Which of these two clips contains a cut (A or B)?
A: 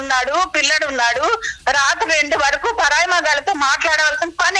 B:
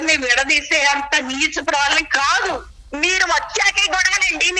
B